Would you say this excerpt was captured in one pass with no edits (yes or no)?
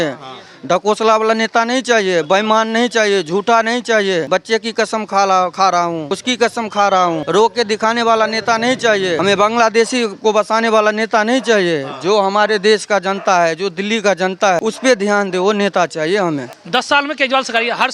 no